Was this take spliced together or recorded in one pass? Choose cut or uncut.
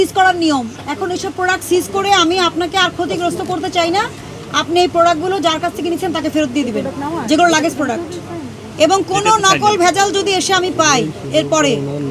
uncut